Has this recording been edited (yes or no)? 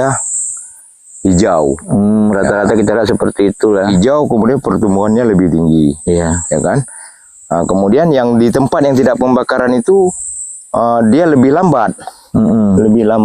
no